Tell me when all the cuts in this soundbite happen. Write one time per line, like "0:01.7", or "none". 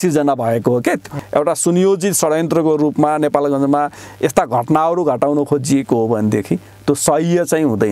0:01.2